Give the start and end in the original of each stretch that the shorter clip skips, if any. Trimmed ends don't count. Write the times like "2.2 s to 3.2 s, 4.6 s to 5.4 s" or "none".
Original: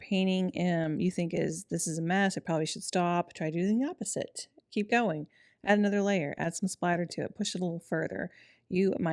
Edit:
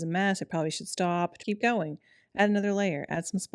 3.3 s to 4.6 s